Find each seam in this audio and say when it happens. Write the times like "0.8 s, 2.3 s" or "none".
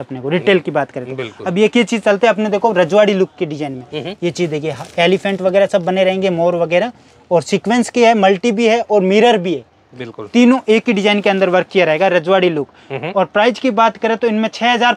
none